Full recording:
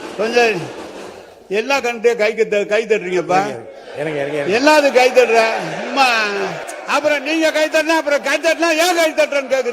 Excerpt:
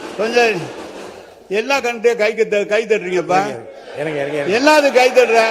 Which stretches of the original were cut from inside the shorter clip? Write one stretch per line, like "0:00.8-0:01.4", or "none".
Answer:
none